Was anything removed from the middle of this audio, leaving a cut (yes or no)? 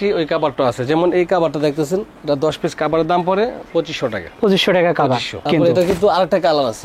yes